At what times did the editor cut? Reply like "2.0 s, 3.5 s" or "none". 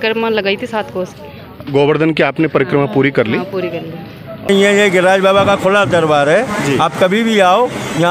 4.5 s